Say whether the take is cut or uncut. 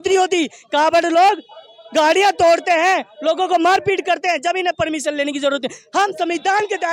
uncut